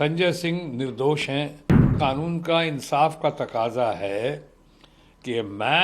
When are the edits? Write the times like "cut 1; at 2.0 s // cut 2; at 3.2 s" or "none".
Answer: cut 1; at 1.9 s